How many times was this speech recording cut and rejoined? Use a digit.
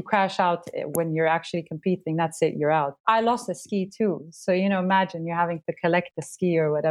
1